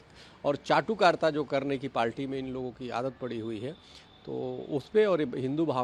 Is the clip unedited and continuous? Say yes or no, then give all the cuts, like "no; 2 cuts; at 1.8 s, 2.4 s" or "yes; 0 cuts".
yes; 0 cuts